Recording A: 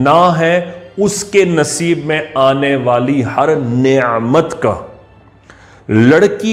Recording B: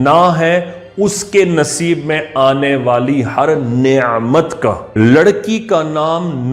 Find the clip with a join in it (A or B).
B